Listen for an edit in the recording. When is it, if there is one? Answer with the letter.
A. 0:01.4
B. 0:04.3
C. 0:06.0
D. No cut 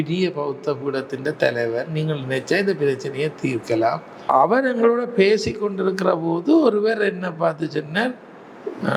B